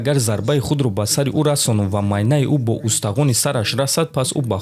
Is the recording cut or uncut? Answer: uncut